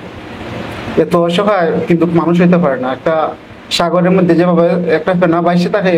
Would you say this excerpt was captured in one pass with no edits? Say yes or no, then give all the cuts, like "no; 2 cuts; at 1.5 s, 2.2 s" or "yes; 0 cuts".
yes; 0 cuts